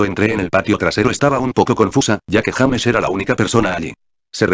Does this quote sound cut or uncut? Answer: cut